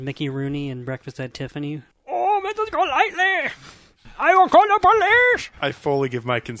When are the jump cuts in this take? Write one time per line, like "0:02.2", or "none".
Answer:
0:01.9
0:04.1